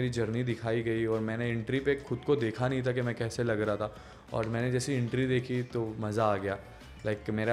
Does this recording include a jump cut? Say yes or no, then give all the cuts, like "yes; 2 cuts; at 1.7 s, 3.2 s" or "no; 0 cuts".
no; 0 cuts